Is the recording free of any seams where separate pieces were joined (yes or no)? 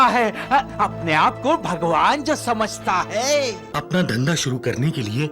no